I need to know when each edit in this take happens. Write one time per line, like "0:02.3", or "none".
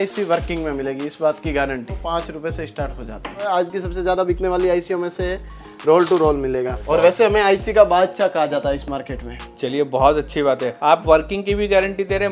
0:02.0
0:03.4
0:06.8